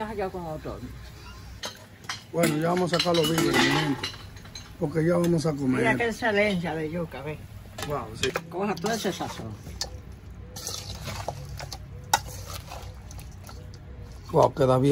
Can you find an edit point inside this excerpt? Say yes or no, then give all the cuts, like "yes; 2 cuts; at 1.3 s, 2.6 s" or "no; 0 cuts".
yes; 2 cuts; at 1.5 s, 8.3 s